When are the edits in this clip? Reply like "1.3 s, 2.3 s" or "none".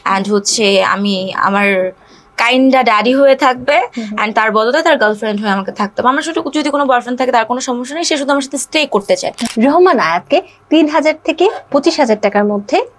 9.5 s

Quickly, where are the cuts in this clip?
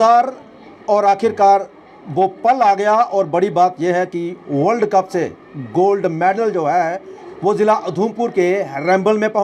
none

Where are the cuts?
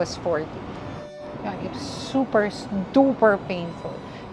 1.2 s

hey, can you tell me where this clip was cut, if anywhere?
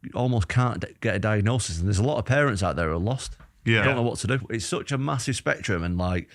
4.5 s

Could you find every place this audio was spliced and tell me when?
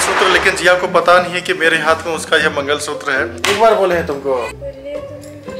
3.4 s

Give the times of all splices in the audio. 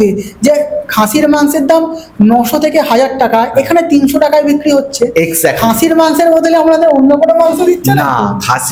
none

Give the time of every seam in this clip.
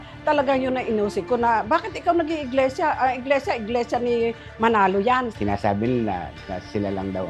5.3 s

